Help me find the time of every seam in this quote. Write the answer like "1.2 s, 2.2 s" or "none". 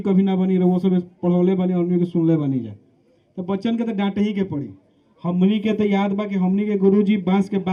none